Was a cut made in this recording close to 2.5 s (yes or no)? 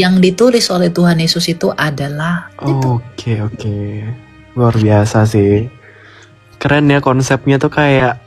yes